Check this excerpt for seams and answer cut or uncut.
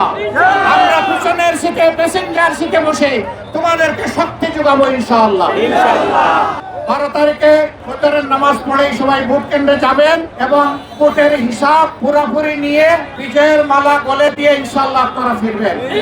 cut